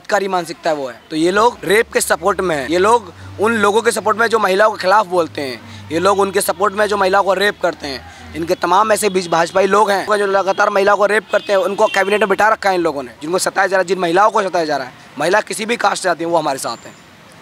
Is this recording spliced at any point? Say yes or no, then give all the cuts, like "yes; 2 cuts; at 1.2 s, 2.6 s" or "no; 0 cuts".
yes; 4 cuts; at 1.4 s, 2.6 s, 10.1 s, 13.1 s